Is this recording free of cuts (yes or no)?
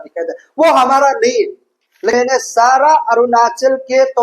no